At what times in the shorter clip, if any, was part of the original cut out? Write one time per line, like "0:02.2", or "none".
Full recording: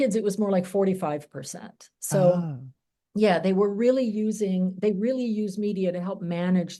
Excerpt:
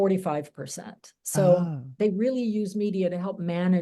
0:01.9